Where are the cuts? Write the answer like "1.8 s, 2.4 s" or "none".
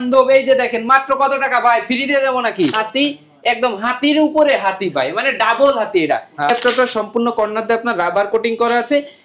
2.7 s, 6.5 s